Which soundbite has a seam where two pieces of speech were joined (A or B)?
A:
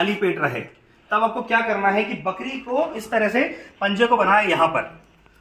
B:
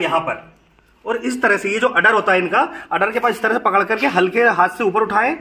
A